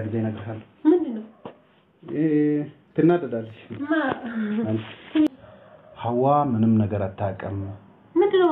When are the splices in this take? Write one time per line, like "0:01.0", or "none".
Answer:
0:05.3